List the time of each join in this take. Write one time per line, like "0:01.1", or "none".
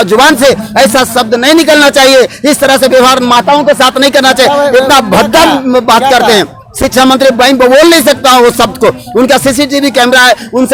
none

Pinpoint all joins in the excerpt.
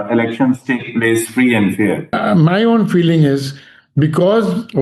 0:02.1

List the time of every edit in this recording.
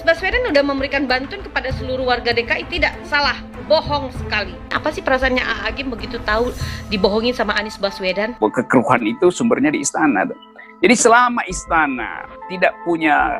0:04.7
0:08.4

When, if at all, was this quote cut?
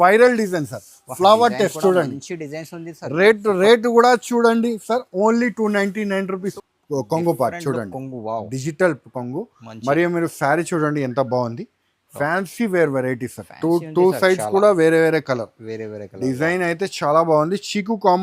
0:06.5

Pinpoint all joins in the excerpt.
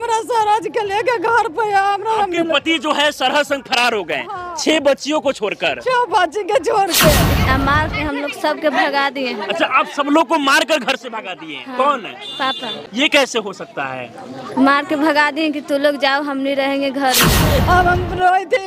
0:07.4
0:12.9
0:17.5

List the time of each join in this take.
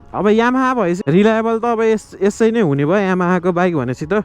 0:01.0

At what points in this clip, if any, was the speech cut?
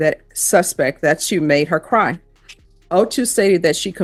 none

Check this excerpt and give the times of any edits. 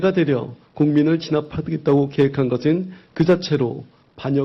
0:02.9

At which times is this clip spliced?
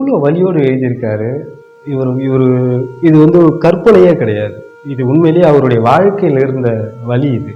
none

